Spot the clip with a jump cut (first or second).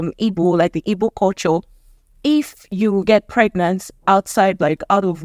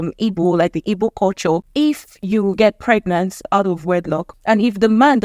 second